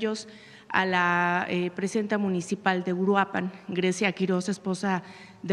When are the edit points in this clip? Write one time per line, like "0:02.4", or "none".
none